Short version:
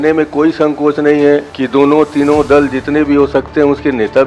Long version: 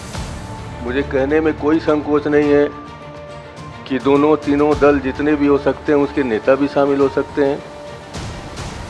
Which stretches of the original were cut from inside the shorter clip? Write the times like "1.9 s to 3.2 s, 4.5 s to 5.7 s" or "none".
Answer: 2.8 s to 3.9 s